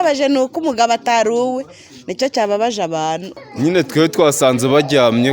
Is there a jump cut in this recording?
yes; 1 cut; at 3.4 s

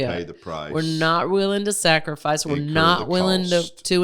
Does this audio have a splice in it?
no; 0 cuts

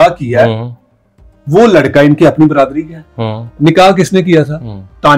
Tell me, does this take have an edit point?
yes; 1 cut; at 3.6 s

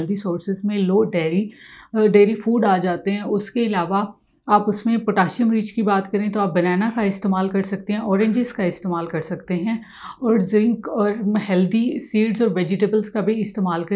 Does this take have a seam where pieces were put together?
no; 0 cuts

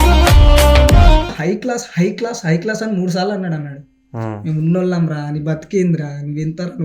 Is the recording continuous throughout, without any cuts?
no; 1 cut; at 1.3 s

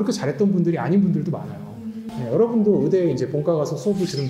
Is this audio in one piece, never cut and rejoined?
no; 1 cut; at 2.0 s

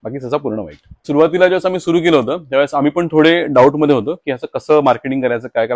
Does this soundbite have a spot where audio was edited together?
yes; 1 cut; at 1.0 s

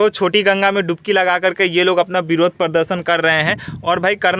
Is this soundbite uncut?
yes; 0 cuts

